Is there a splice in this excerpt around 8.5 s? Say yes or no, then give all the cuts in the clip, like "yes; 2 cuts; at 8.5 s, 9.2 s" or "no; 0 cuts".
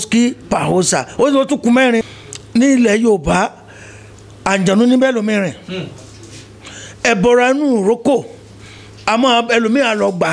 no; 1 cut; at 2.1 s